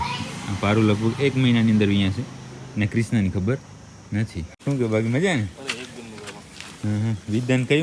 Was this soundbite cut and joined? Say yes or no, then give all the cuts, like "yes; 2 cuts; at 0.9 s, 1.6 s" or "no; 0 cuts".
yes; 1 cut; at 4.5 s